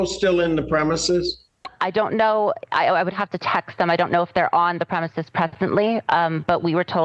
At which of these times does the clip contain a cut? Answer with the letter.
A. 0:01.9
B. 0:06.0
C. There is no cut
C